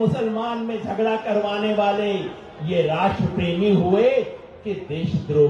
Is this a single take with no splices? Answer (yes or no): yes